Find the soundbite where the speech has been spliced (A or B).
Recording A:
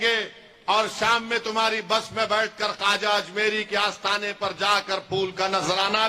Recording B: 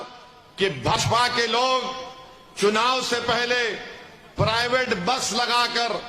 B